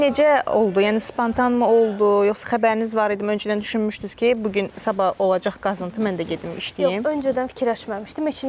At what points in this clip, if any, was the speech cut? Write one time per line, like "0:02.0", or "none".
none